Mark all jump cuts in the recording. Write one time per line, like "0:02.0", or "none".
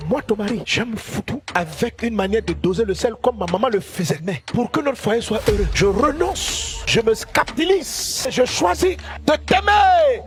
none